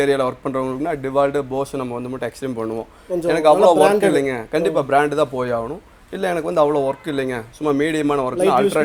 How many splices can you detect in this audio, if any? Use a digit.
0